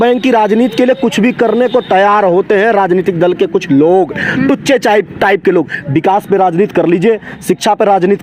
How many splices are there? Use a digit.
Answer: 0